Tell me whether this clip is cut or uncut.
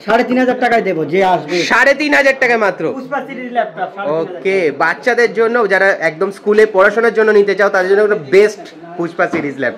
uncut